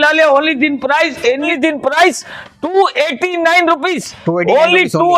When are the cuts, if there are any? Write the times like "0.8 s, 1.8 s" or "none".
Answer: 1.5 s